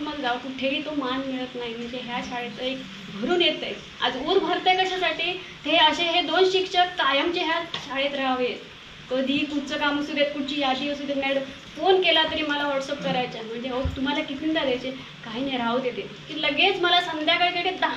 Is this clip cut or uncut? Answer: uncut